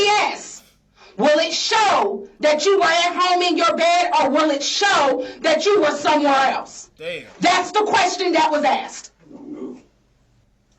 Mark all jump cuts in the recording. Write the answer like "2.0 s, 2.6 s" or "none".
none